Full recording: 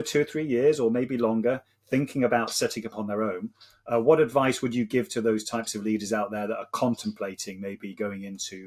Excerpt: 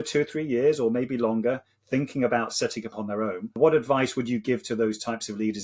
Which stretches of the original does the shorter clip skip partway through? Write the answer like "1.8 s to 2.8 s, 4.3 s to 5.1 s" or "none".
3.6 s to 4.0 s